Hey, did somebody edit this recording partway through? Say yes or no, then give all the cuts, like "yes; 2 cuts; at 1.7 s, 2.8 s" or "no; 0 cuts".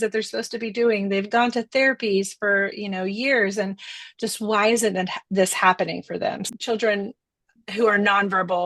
yes; 1 cut; at 6.4 s